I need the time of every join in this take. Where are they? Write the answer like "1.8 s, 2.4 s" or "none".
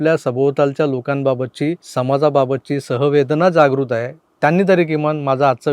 1.8 s